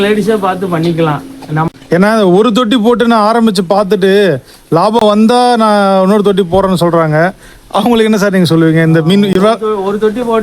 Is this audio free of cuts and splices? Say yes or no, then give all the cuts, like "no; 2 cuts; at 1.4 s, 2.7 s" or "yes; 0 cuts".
no; 1 cut; at 1.7 s